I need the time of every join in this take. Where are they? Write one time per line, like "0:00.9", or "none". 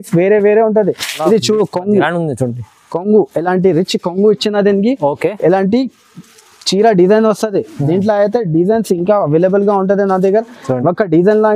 0:01.2